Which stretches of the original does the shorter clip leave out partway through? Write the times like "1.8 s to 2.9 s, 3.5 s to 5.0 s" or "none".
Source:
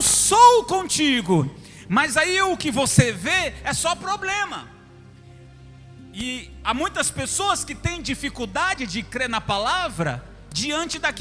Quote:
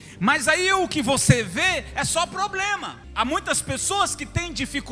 4.7 s to 6.5 s